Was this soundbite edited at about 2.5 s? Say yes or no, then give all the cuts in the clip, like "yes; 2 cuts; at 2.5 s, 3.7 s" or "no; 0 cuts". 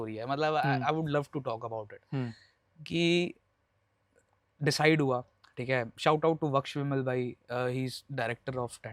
no; 0 cuts